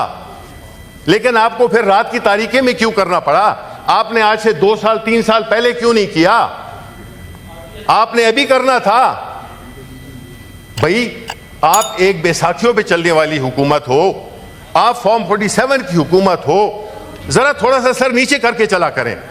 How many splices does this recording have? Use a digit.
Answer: 0